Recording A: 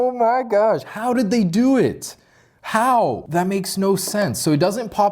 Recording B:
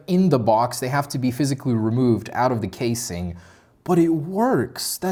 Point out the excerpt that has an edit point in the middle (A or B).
A